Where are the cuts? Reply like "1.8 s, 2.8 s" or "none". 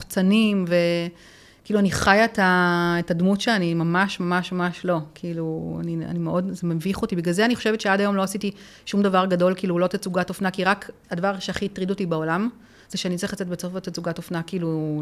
none